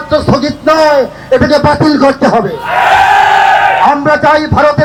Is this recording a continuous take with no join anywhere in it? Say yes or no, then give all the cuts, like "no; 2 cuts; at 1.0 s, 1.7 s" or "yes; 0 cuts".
yes; 0 cuts